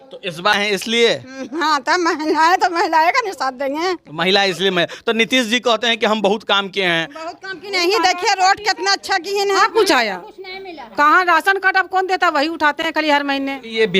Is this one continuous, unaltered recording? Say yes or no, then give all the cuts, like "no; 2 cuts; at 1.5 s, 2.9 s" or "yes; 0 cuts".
no; 1 cut; at 9.6 s